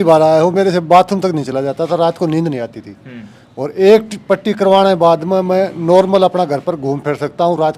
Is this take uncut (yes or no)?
yes